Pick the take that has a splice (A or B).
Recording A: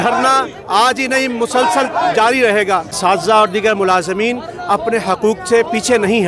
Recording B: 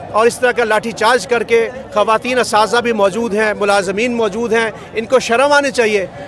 A